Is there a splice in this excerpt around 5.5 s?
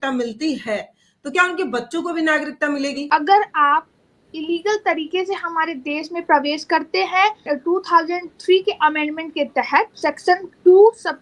no; 3 cuts; at 3.0 s, 7.5 s, 9.9 s

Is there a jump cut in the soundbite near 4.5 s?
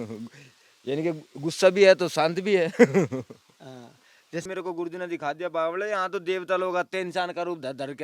yes; 1 cut; at 4.5 s

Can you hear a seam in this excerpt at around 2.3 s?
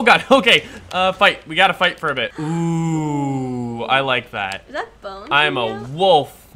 yes; 1 cut; at 2.3 s

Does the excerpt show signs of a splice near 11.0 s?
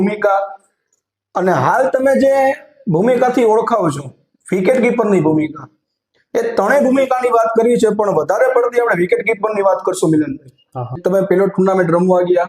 yes; 1 cut; at 11.0 s

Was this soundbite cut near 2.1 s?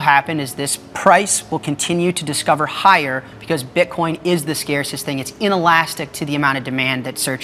no; 0 cuts

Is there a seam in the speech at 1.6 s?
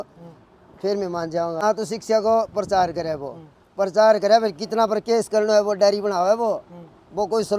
yes; 1 cut; at 1.6 s

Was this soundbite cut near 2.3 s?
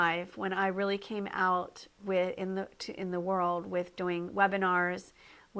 yes; 1 cut; at 2.3 s

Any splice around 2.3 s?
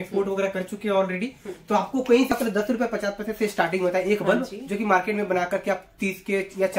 yes; 1 cut; at 2.3 s

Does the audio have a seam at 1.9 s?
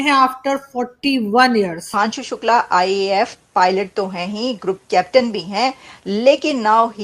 yes; 1 cut; at 1.9 s

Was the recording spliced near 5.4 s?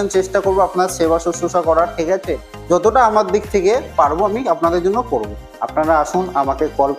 yes; 1 cut; at 5.4 s

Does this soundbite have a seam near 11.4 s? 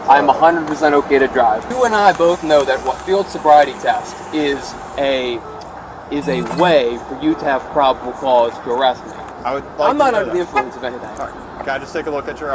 no; 2 cuts; at 1.7 s, 9.3 s

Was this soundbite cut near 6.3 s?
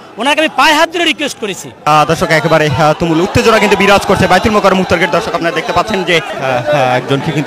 yes; 2 cuts; at 1.9 s, 6.3 s

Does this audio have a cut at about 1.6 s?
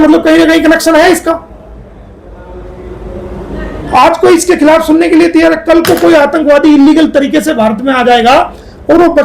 no; 0 cuts

